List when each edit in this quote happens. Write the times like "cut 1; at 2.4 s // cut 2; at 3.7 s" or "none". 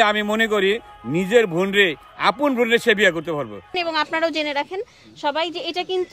cut 1; at 3.8 s